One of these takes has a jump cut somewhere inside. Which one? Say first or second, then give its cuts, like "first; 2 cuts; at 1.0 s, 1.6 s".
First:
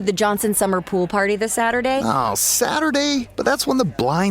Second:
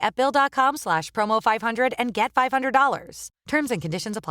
first; 1 cut; at 2.0 s